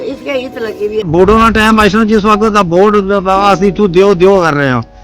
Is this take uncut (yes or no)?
no